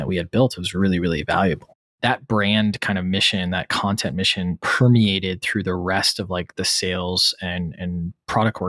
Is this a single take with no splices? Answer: no; 1 cut; at 1.7 s

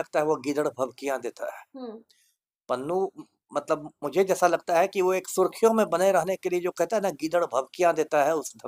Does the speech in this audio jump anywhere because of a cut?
no; 0 cuts

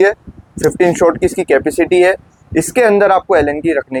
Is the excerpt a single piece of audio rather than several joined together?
yes; 0 cuts

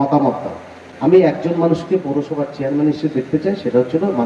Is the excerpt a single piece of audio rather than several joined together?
no; 1 cut; at 1.1 s

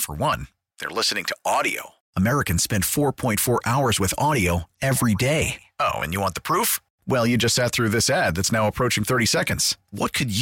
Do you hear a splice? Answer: no; 0 cuts

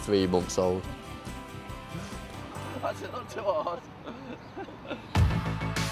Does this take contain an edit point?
no; 0 cuts

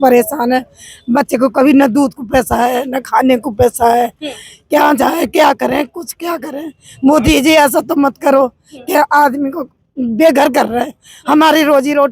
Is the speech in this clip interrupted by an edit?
no; 0 cuts

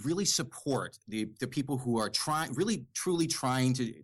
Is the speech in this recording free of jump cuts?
yes; 0 cuts

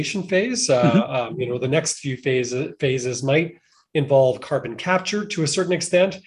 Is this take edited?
no; 0 cuts

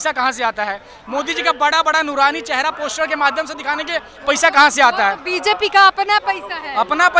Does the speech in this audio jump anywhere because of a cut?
no; 0 cuts

